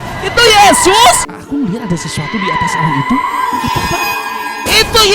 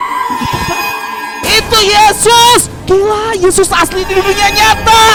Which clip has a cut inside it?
first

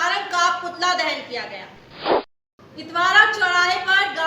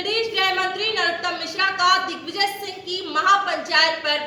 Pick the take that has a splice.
first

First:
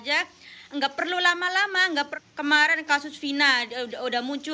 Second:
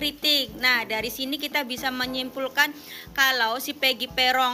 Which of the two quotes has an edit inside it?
first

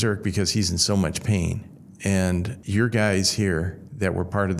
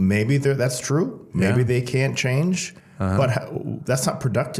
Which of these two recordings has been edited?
first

